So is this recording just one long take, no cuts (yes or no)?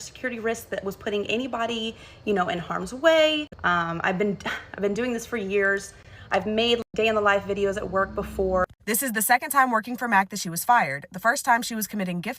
no